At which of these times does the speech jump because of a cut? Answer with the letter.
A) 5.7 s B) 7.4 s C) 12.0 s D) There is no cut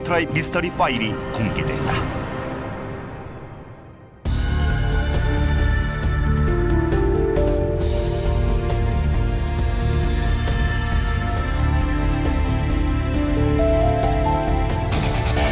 D